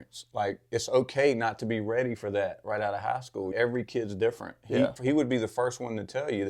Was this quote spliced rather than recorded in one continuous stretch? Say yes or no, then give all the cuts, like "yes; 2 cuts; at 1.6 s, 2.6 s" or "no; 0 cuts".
yes; 2 cuts; at 3.5 s, 5.0 s